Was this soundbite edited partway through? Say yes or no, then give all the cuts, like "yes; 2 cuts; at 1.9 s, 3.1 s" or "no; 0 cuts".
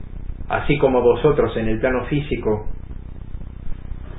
yes; 1 cut; at 1.5 s